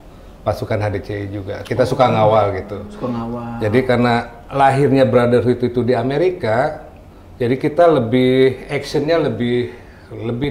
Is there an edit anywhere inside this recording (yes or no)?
no